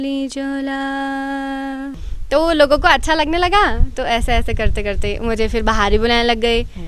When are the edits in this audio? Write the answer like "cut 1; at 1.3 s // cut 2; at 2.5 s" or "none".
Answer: cut 1; at 1.9 s

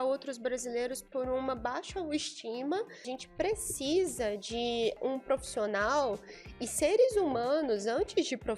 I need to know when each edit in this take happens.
cut 1; at 3.1 s // cut 2; at 5.0 s

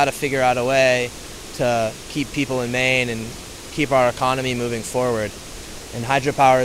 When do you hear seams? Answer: none

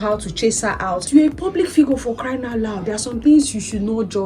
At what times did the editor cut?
cut 1; at 1.1 s

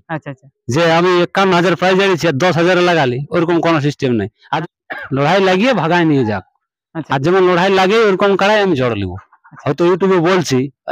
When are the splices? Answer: cut 1; at 4.4 s

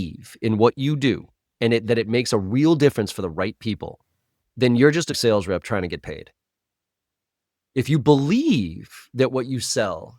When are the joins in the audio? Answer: cut 1; at 5.2 s

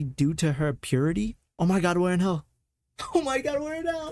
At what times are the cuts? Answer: cut 1; at 1.4 s

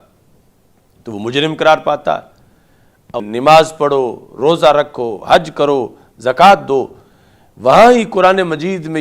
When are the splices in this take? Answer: cut 1; at 3.2 s

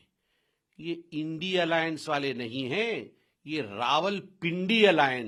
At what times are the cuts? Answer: none

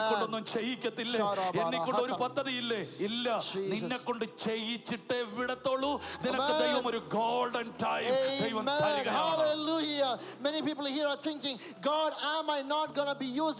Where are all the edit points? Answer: none

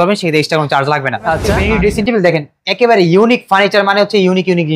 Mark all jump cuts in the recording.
cut 1; at 1.5 s

